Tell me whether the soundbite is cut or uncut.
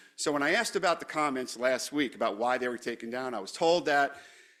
uncut